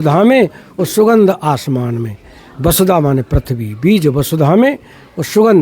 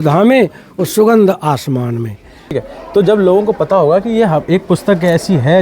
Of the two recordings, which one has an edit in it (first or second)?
second